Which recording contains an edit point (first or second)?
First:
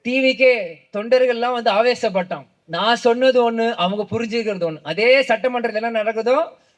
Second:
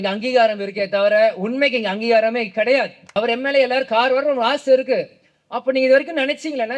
second